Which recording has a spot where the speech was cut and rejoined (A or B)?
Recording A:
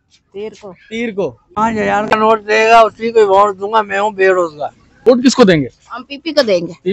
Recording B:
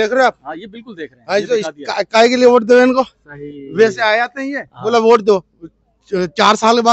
A